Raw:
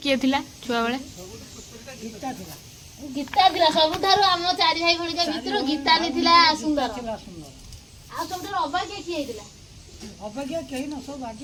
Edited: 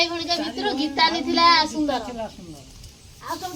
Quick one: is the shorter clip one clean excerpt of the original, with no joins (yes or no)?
yes